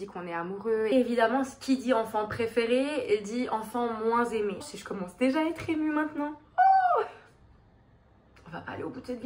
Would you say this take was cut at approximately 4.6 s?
yes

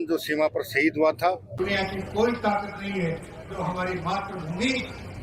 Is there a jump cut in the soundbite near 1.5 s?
yes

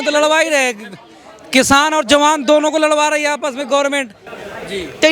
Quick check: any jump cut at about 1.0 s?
no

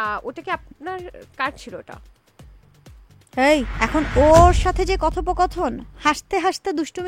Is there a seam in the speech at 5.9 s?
no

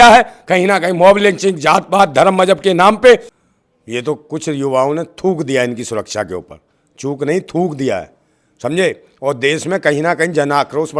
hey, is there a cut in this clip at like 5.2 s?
no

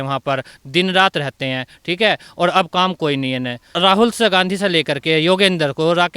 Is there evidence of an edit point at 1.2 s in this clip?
no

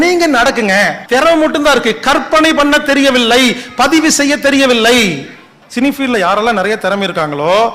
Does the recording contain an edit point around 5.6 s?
yes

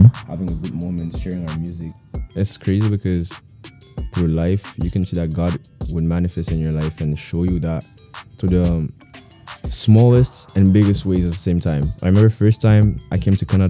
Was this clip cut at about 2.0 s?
yes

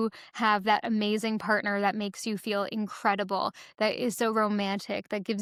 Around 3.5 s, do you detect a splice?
no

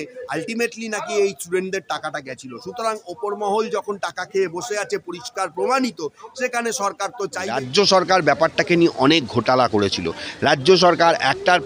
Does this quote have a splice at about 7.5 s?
yes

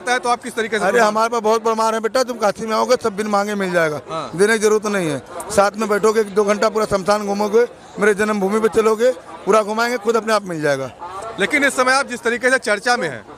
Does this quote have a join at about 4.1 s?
no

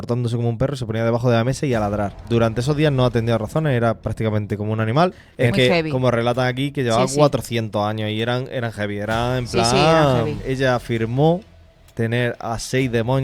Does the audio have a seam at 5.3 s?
yes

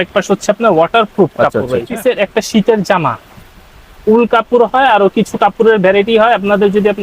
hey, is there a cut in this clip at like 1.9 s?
yes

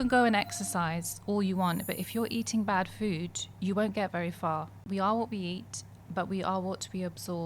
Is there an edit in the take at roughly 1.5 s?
no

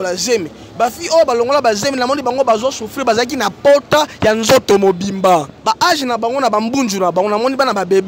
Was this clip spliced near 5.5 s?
yes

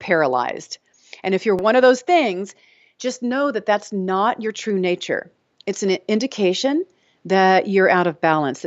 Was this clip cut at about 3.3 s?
no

